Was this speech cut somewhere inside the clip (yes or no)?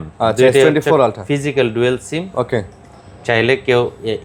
no